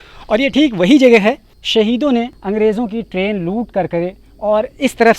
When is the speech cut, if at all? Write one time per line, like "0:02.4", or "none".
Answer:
0:01.5
0:02.4